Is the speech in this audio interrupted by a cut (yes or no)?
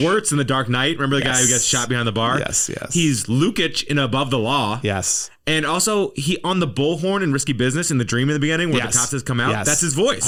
no